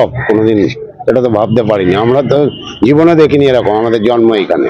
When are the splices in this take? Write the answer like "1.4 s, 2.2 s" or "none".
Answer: none